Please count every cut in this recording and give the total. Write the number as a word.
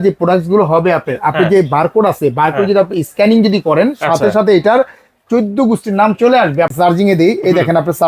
one